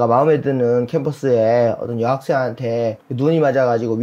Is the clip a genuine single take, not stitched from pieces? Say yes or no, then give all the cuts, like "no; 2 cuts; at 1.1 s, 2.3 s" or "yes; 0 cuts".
no; 1 cut; at 3.0 s